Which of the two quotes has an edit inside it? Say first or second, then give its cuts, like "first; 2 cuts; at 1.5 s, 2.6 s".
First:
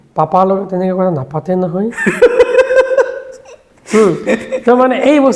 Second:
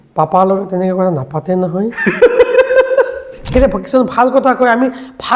second; 1 cut; at 3.5 s